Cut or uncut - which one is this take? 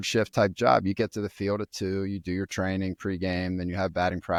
uncut